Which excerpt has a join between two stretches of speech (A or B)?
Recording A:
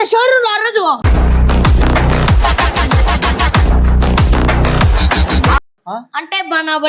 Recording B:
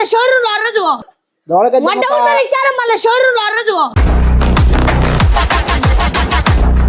A